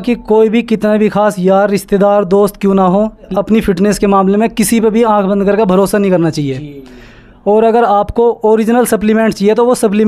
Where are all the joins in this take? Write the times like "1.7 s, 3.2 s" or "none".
3.3 s